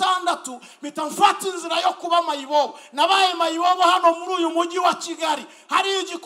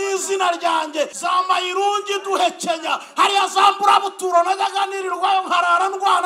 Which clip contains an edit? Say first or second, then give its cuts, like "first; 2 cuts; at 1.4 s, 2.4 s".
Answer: second; 1 cut; at 1.2 s